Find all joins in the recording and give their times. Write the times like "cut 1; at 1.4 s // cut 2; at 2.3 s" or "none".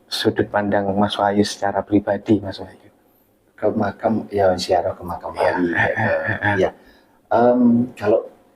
none